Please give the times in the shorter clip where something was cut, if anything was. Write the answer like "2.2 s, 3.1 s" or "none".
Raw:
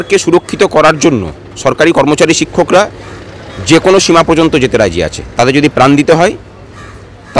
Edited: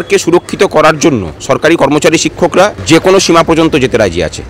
1.3 s, 2.8 s